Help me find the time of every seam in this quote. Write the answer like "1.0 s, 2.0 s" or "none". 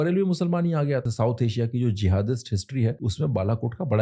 1.0 s, 3.0 s